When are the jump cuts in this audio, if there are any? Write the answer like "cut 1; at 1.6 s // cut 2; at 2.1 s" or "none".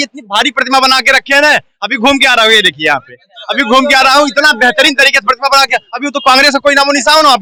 none